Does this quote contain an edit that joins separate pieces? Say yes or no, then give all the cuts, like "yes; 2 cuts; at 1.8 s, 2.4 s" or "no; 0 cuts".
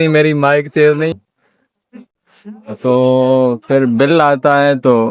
yes; 1 cut; at 1.1 s